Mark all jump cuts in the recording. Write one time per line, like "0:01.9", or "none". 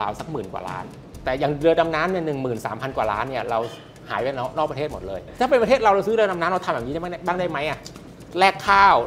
0:01.1
0:05.3